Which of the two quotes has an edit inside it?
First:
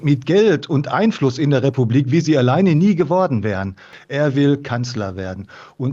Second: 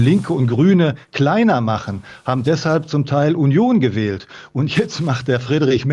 first; 1 cut; at 4.0 s

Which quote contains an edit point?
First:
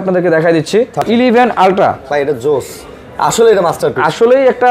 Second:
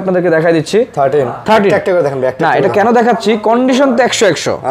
first; 1 cut; at 1.0 s

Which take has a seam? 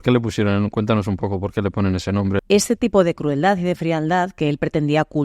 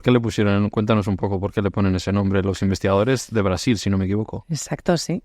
first; 1 cut; at 2.4 s

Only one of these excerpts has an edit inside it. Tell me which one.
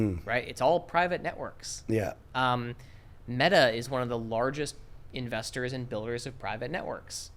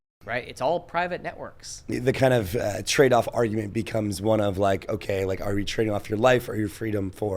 second; 1 cut; at 1.9 s

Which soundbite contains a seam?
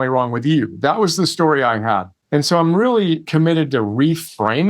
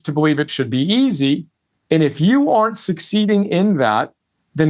first; 2 cuts; at 2.1 s, 3.2 s

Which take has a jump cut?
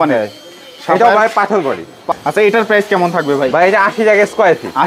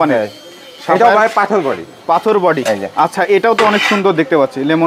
first; 1 cut; at 2.1 s

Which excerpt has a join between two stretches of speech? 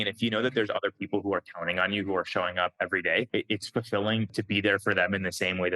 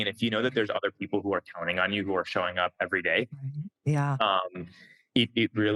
first; 2 cuts; at 3.3 s, 4.3 s

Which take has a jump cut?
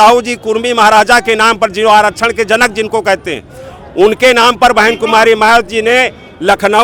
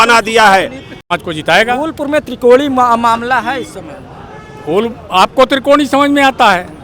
second; 1 cut; at 1.1 s

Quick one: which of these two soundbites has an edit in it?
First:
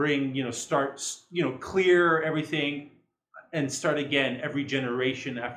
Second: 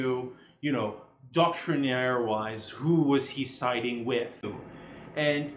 second; 1 cut; at 4.5 s

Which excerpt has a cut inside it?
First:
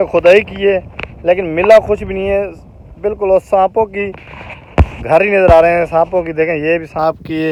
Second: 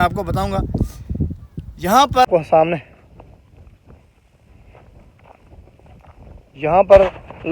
second; 1 cut; at 2.3 s

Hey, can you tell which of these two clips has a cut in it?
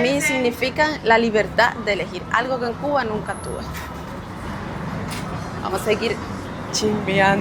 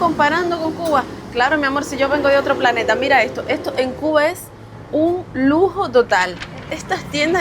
second; 1 cut; at 6.5 s

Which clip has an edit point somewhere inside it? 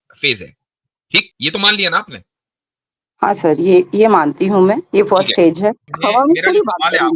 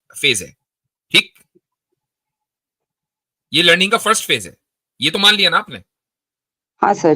first; 2 cuts; at 1.3 s, 5.9 s

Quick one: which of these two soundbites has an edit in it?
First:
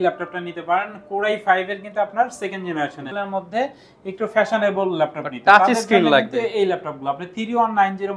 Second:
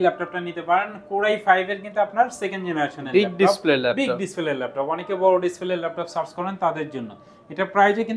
first; 1 cut; at 3.0 s

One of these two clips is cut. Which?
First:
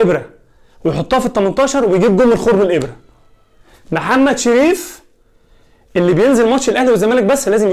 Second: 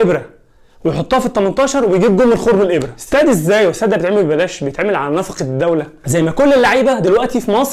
second; 2 cuts; at 3.0 s, 6.0 s

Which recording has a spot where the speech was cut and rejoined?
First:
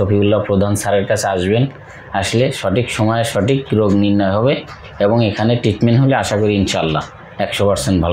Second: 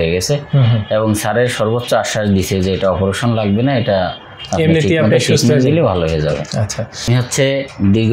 second; 1 cut; at 7.1 s

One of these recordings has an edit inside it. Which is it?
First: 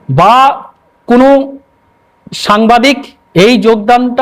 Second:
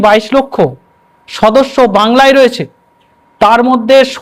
first; 1 cut; at 3.1 s

